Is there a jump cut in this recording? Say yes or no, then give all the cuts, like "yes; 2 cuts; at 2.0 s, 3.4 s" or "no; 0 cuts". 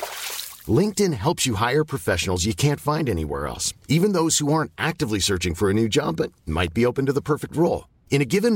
no; 0 cuts